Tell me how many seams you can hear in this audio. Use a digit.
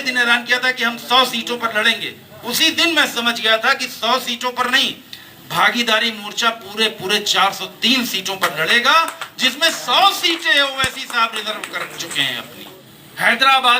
1